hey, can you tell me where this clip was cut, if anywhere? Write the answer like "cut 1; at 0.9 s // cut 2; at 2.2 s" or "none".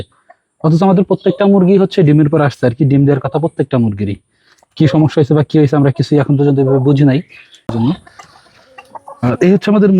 cut 1; at 7.7 s